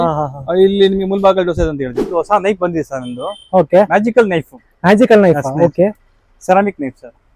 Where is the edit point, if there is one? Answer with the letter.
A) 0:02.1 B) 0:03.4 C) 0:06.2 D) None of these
A